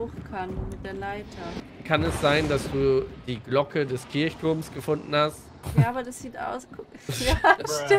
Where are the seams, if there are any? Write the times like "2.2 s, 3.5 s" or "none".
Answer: 1.6 s